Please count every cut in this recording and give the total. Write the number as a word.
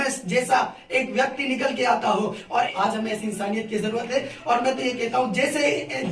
one